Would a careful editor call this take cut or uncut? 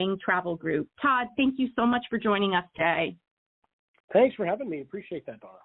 uncut